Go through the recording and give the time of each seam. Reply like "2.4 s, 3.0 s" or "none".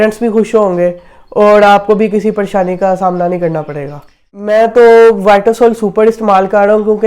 4.4 s